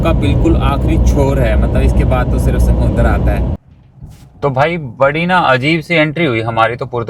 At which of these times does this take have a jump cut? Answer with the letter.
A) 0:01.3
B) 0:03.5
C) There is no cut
B